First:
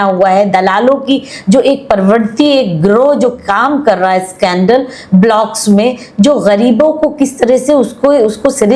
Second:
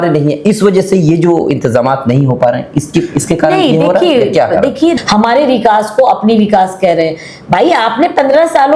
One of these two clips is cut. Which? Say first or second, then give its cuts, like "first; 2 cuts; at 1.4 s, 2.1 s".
second; 1 cut; at 4.9 s